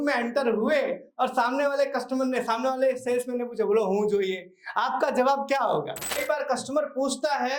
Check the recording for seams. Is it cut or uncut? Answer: cut